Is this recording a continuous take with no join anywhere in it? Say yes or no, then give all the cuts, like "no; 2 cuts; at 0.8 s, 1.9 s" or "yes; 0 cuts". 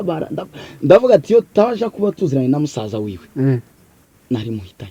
yes; 0 cuts